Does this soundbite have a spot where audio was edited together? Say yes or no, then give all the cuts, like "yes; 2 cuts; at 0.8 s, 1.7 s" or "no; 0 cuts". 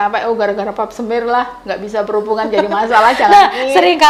no; 0 cuts